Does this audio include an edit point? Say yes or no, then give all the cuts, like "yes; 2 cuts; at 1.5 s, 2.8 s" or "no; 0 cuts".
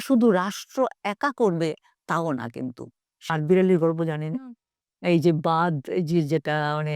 yes; 1 cut; at 3.1 s